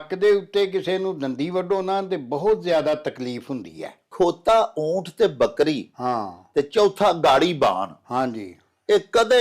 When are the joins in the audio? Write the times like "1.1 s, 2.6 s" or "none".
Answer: 4.0 s

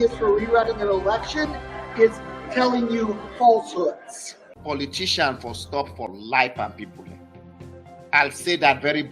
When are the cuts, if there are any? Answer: 4.5 s

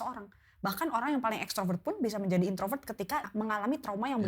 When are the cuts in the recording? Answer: 3.3 s

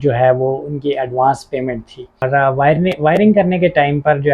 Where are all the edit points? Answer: 2.3 s

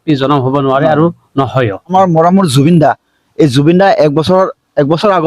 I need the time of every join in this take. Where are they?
1.9 s

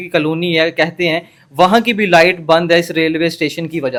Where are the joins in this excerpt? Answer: none

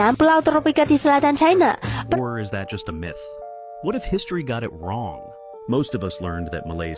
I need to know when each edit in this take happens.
1.9 s

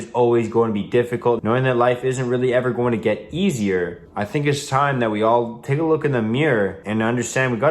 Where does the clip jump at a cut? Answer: 1.4 s, 4.0 s, 6.8 s

